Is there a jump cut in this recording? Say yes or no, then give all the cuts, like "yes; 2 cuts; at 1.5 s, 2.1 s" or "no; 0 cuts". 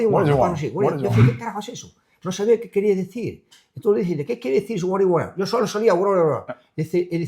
no; 0 cuts